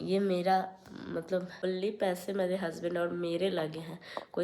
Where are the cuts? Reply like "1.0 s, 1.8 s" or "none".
1.5 s